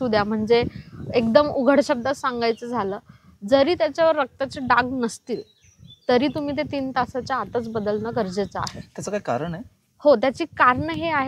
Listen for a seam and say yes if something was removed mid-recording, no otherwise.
no